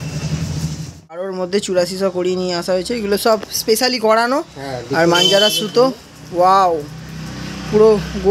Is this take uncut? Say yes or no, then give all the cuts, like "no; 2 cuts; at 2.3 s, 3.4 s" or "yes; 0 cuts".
no; 1 cut; at 1.2 s